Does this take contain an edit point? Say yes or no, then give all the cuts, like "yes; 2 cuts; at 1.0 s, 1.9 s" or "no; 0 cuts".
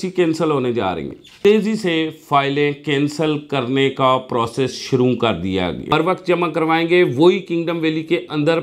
yes; 2 cuts; at 1.3 s, 5.9 s